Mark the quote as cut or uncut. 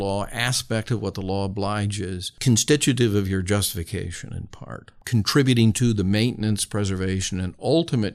cut